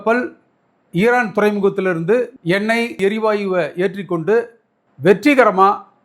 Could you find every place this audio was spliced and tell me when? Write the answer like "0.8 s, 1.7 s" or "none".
3.0 s